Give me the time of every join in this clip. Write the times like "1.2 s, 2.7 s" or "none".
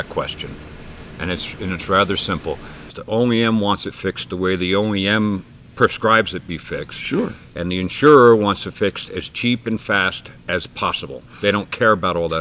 2.9 s